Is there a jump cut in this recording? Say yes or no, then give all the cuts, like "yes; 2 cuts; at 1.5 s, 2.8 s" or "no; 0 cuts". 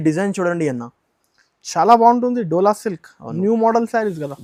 no; 0 cuts